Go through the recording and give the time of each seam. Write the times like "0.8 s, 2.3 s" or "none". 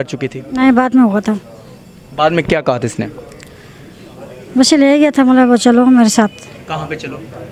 none